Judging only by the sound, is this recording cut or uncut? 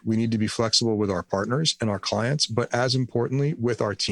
uncut